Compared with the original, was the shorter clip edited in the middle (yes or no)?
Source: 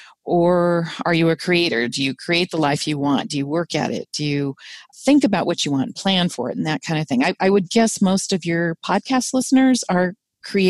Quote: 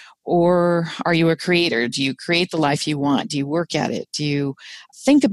no